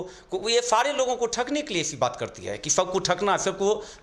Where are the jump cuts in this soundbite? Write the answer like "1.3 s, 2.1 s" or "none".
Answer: none